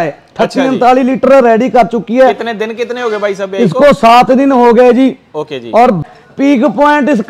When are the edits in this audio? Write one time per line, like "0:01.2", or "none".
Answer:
0:06.0